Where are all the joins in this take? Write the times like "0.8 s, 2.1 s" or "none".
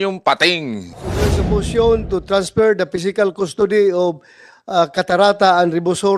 1.2 s